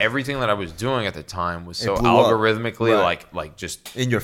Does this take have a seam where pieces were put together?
no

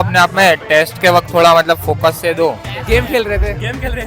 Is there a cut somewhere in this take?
yes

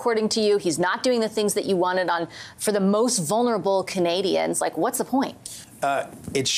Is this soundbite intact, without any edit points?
no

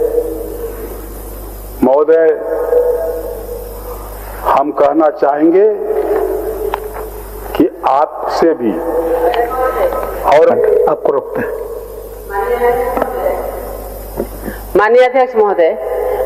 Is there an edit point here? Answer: yes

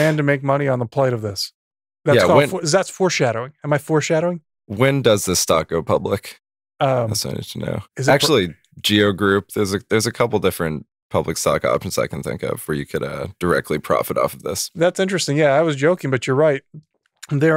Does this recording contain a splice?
yes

